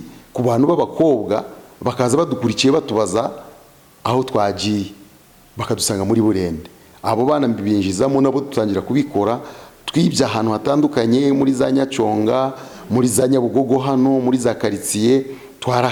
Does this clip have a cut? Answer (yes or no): no